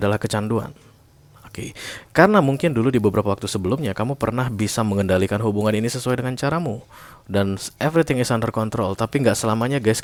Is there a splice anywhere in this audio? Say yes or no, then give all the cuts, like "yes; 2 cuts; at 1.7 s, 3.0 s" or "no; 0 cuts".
no; 0 cuts